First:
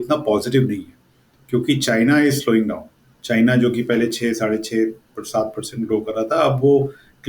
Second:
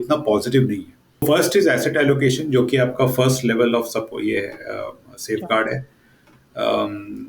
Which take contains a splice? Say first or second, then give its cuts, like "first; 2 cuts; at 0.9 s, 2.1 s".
second; 1 cut; at 1.2 s